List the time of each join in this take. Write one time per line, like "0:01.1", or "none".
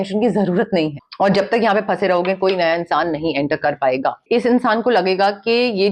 0:01.0
0:04.2